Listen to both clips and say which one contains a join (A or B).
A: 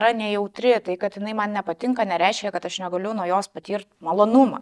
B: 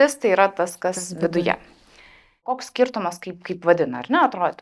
B